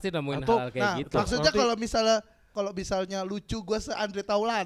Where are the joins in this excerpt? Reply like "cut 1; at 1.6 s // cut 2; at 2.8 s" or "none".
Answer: cut 1; at 2.4 s